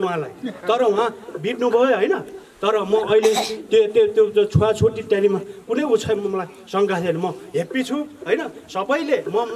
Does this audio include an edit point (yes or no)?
no